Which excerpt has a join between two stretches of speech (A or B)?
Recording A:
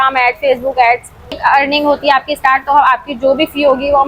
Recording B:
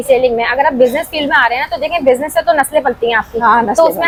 A